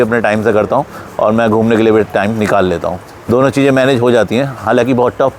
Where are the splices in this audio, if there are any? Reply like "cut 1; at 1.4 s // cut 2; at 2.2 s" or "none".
none